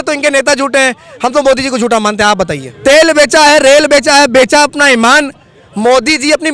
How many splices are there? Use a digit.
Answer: 1